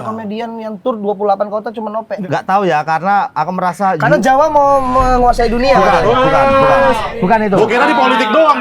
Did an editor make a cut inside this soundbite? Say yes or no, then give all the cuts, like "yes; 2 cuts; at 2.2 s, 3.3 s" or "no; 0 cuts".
yes; 1 cut; at 2.1 s